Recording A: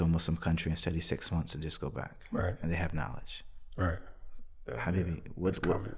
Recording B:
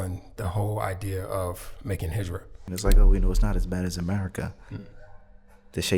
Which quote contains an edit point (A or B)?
B